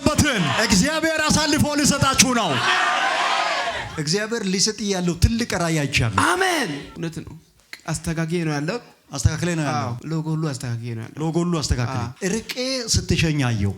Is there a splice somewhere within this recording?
yes; 3 cuts; at 3.9 s, 6.9 s, 12.0 s

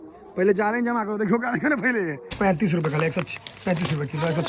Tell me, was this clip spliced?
yes; 1 cut; at 2.2 s

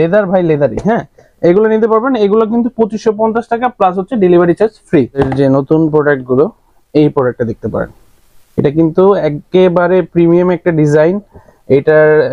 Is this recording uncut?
yes; 0 cuts

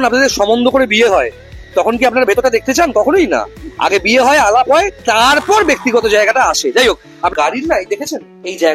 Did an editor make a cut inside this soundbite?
yes; 1 cut; at 7.3 s

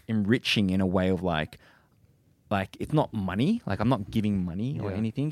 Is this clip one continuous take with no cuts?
yes; 0 cuts

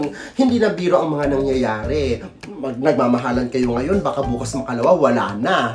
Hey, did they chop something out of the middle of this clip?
no; 0 cuts

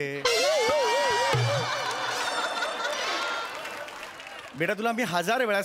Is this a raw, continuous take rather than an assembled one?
yes; 0 cuts

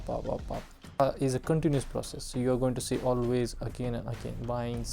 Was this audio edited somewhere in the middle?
yes; 1 cut; at 1.0 s

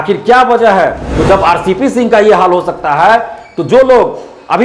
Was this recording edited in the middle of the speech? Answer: yes; 1 cut; at 1.1 s

